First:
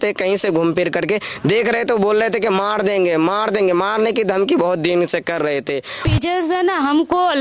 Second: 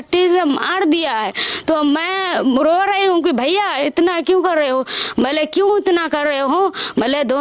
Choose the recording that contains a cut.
first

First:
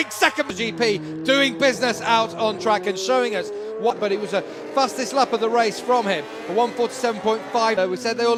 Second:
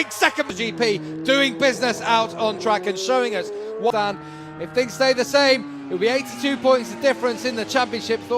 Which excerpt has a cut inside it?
second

